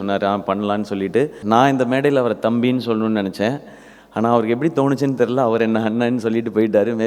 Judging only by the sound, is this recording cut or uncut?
cut